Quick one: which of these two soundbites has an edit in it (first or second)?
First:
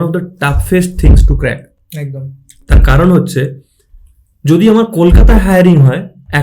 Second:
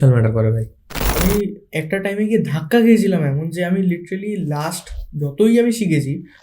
second